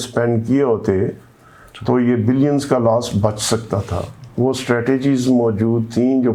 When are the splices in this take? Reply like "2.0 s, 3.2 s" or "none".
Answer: none